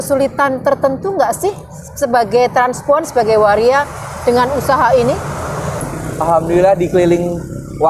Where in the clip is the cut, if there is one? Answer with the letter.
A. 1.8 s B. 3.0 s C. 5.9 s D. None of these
C